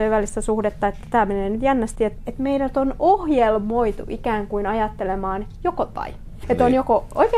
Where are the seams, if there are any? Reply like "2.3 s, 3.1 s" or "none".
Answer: 2.1 s, 6.4 s